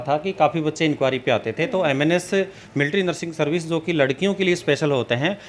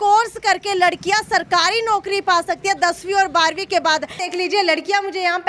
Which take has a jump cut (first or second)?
second